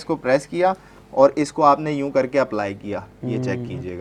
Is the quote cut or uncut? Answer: uncut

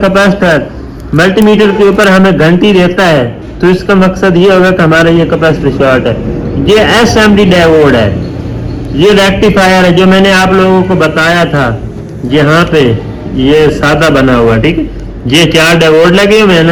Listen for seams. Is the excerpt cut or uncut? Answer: uncut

